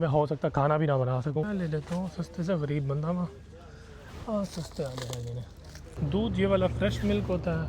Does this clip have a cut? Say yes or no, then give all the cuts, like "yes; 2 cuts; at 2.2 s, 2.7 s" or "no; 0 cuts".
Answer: yes; 2 cuts; at 1.5 s, 5.8 s